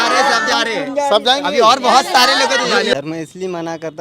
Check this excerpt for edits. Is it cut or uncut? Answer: cut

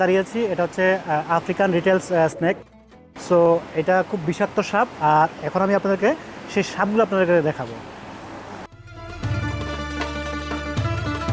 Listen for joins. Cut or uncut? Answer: uncut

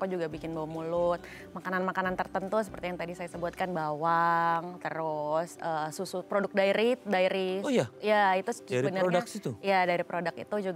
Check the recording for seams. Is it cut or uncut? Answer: uncut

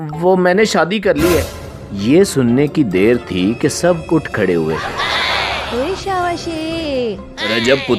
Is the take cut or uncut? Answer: uncut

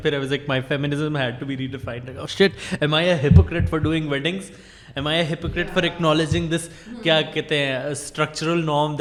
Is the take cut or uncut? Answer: uncut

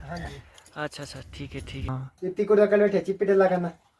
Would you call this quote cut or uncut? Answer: cut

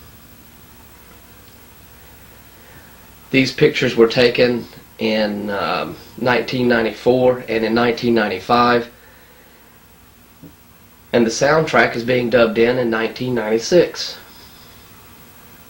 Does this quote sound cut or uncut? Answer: cut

